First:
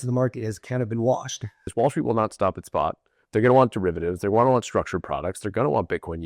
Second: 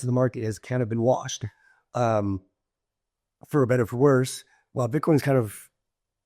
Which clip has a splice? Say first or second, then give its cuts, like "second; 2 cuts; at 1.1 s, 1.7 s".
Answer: first; 1 cut; at 1.7 s